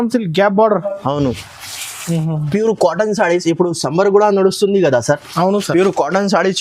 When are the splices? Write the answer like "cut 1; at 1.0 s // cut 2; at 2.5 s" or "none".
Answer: cut 1; at 2.5 s